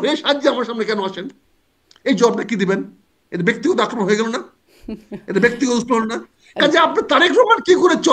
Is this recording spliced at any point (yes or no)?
no